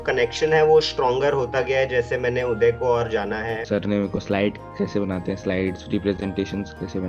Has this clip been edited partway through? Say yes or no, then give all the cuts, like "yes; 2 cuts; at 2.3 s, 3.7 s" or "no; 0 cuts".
yes; 1 cut; at 3.6 s